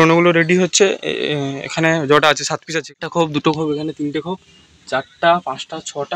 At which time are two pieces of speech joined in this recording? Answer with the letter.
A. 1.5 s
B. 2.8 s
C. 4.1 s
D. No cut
B